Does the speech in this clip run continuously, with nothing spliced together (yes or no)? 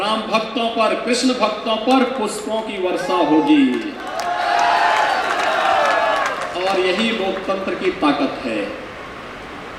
yes